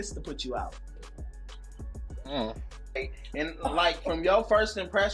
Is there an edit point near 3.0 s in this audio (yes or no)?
yes